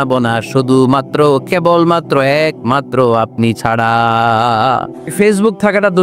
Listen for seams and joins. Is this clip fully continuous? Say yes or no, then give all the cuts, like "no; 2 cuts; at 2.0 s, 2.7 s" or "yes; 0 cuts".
no; 1 cut; at 5.1 s